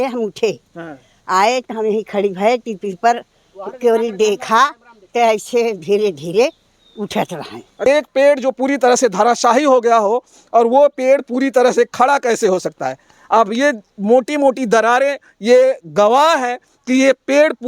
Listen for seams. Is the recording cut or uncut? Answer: cut